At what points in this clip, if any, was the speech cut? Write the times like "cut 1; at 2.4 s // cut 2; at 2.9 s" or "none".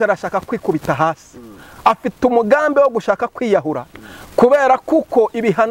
none

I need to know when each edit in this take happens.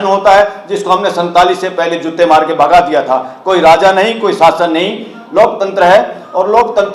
none

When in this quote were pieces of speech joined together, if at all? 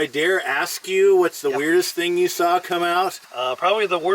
cut 1; at 3.2 s

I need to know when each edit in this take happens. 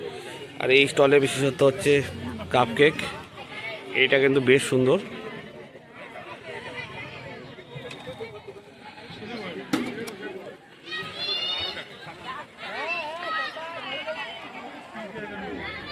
none

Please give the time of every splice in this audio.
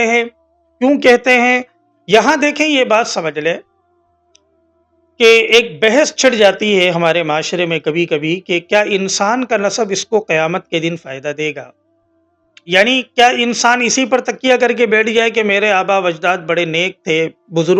cut 1; at 1.8 s

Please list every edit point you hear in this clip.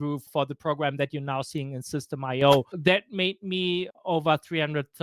cut 1; at 2.7 s // cut 2; at 3.9 s

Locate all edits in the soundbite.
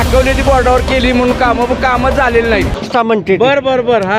cut 1; at 2.8 s

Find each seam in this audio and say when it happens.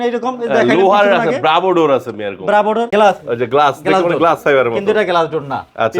cut 1; at 2.9 s

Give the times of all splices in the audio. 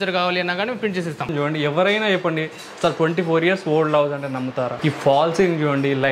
cut 1; at 1.3 s // cut 2; at 4.7 s

